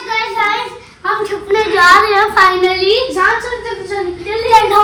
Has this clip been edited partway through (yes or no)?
no